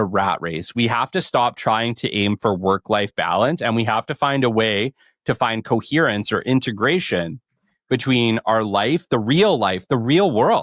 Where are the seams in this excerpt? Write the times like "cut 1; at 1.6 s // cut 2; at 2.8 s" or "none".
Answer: none